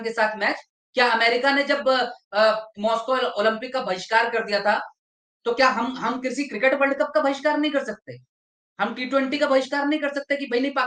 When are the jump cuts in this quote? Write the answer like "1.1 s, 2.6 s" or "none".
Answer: none